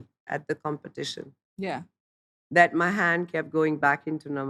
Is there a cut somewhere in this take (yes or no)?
no